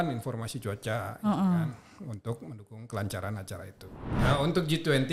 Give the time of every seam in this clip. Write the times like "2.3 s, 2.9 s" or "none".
4.1 s

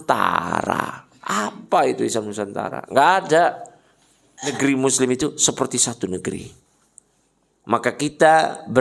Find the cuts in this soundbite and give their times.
4.5 s

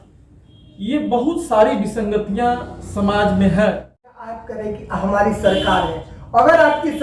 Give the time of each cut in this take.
4.5 s

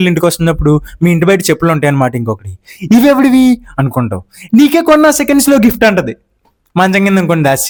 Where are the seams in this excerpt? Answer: none

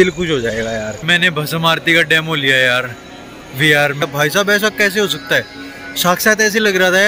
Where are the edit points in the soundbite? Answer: 1.1 s, 4.0 s

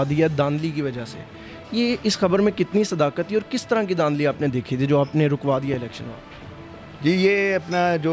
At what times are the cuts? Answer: none

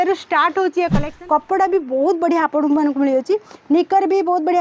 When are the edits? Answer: 1.1 s

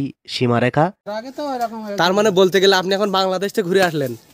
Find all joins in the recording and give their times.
1.1 s

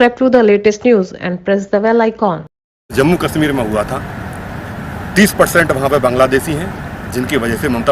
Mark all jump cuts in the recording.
2.9 s

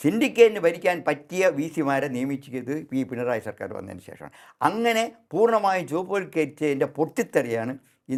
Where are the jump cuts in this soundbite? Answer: none

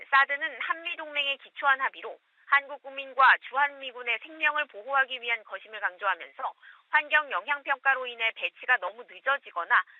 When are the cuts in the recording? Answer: 7.8 s

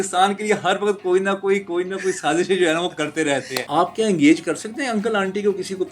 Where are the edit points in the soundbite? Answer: 3.6 s

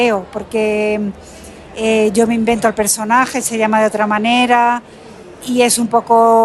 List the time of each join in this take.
none

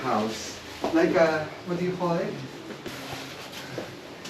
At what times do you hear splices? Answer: 3.0 s

